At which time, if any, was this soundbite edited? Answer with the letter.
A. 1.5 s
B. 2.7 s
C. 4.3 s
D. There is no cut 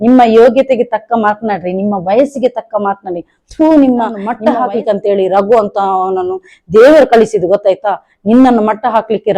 C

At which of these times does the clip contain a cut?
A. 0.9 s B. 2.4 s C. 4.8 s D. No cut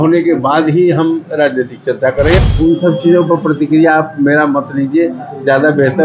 B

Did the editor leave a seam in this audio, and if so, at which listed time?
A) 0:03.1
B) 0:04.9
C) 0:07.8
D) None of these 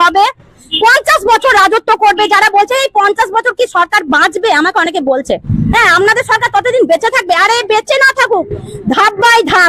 D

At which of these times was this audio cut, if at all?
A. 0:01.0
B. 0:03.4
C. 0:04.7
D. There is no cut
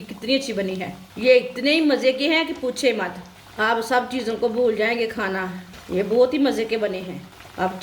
A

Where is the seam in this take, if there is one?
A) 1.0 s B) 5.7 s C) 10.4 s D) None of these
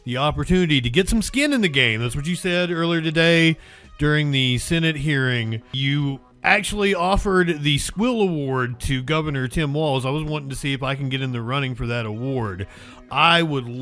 B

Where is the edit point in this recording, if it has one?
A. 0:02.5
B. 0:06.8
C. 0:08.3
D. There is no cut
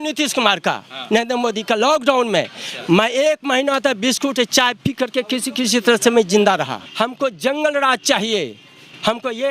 B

